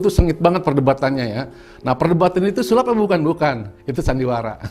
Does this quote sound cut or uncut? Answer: uncut